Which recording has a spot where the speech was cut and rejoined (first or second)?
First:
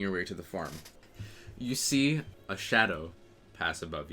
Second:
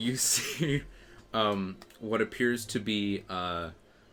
first